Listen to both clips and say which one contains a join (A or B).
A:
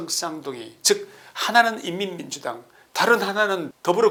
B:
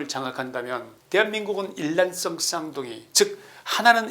B